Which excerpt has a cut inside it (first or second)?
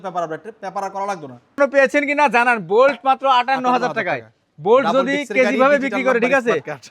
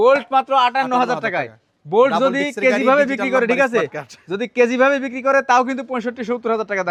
first